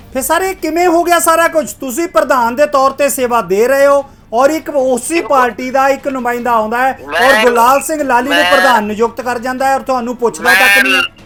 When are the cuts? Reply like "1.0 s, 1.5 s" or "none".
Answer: none